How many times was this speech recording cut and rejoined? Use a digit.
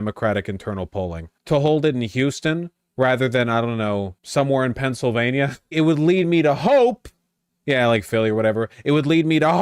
3